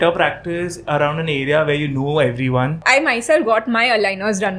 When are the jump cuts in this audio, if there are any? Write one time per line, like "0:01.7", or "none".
0:02.8

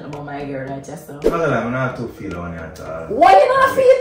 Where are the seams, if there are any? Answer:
0:01.3

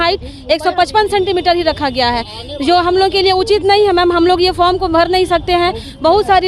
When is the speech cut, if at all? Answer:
none

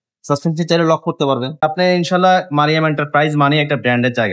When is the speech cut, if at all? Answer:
0:01.6

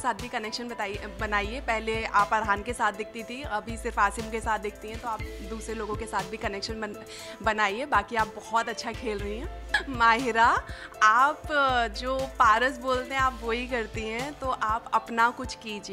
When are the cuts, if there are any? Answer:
none

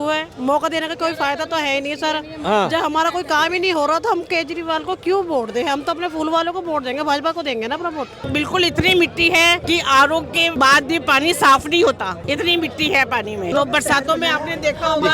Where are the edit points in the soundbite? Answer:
0:08.3
0:09.6
0:10.5
0:12.2
0:13.5

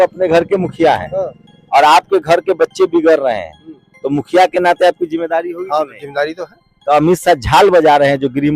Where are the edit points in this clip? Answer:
none

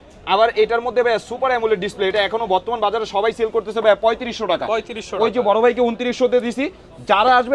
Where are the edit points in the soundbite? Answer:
none

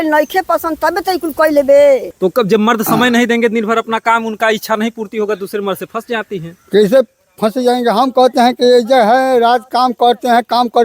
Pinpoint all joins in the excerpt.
0:02.1

